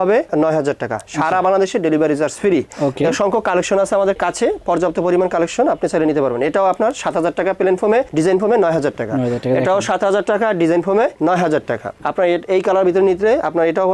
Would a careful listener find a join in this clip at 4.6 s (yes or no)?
no